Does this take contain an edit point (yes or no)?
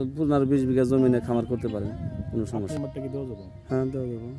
yes